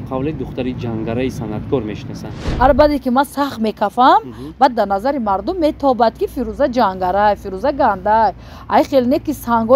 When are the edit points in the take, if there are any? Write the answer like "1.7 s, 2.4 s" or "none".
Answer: 2.4 s